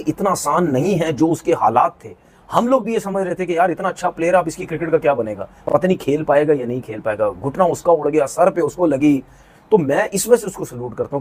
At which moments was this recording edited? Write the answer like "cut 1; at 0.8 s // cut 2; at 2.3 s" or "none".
cut 1; at 6.6 s